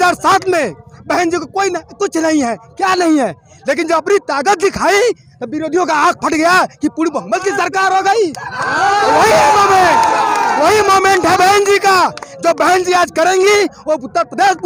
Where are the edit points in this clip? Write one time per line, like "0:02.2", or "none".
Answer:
none